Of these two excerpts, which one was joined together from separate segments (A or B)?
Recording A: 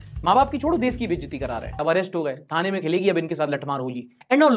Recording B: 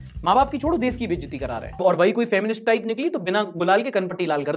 B